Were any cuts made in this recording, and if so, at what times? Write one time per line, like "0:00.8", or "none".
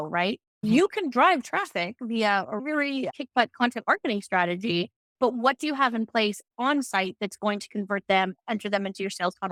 none

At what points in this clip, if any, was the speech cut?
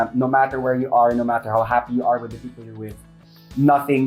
none

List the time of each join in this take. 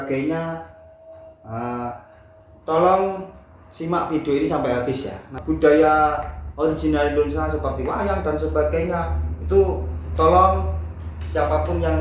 0:05.3

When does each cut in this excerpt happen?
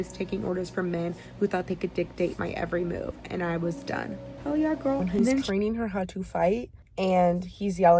0:05.5

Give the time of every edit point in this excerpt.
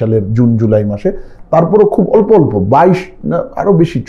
none

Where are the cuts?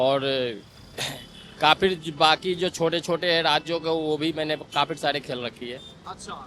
none

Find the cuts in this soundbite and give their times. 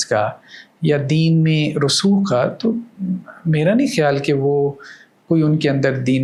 none

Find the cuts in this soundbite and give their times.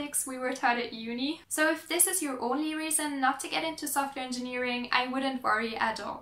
none

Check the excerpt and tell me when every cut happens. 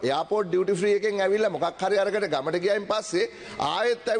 none

